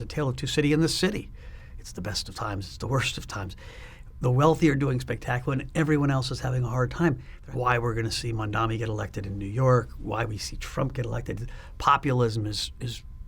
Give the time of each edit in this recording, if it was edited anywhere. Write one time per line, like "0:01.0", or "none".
0:07.3